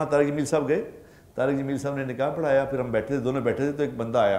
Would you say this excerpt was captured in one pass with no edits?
yes; 0 cuts

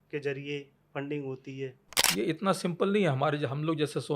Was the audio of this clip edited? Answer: yes; 1 cut; at 2.1 s

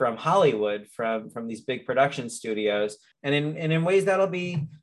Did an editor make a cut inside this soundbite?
yes; 1 cut; at 3.1 s

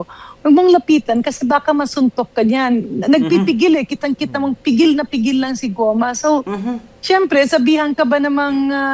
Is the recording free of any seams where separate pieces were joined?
yes; 0 cuts

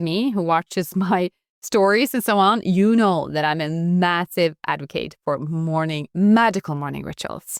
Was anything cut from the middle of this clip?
no; 0 cuts

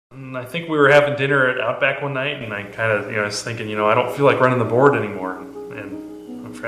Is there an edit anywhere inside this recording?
yes; 1 cut; at 1.6 s

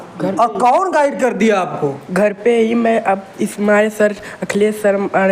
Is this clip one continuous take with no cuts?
yes; 0 cuts

